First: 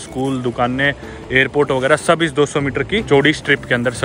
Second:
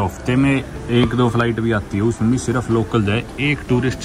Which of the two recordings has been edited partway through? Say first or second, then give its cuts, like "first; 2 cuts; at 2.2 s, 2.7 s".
first; 1 cut; at 3.0 s